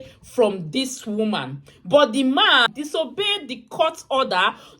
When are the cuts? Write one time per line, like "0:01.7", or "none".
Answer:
0:02.6